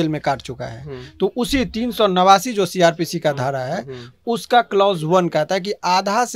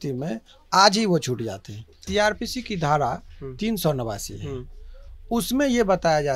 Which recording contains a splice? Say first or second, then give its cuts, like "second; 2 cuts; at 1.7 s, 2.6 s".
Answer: second; 1 cut; at 2.0 s